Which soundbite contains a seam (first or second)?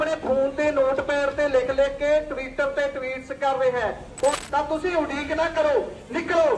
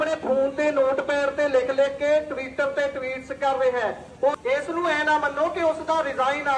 first